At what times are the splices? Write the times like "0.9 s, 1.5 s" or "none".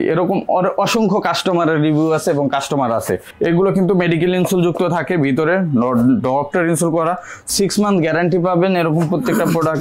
3.3 s, 7.4 s

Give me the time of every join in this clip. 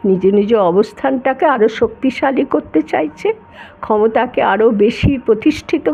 none

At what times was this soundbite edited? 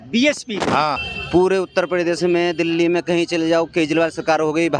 1.1 s

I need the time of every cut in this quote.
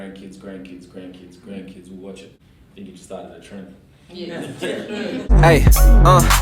2.6 s, 5.3 s

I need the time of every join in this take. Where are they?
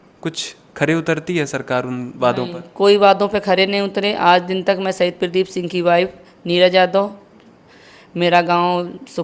none

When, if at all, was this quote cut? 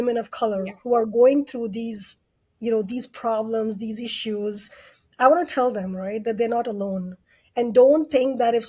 none

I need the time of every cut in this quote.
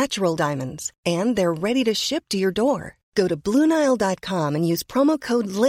none

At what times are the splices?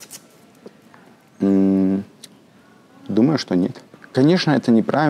3.9 s

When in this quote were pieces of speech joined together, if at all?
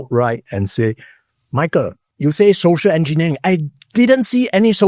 2.0 s

